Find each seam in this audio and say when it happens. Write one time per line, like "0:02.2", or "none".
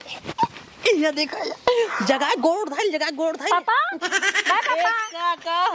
0:04.3

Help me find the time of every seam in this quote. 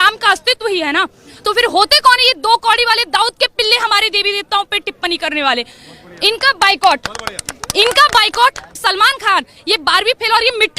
0:08.7

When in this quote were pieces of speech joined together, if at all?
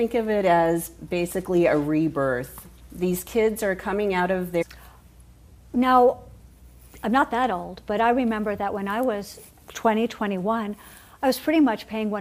none

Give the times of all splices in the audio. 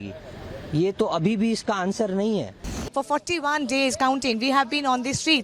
0:02.7

